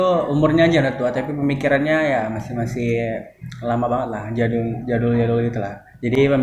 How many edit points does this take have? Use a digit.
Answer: 0